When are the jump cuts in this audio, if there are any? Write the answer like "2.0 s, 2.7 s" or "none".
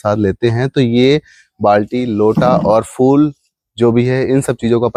none